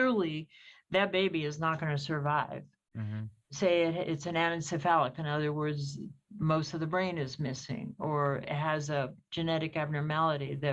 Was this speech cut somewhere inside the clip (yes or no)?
no